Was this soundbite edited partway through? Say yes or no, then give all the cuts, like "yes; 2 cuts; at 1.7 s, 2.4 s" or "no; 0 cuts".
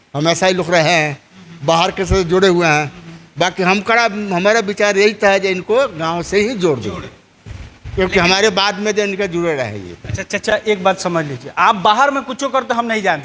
no; 0 cuts